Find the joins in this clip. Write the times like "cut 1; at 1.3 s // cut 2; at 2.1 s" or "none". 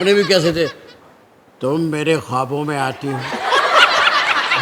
none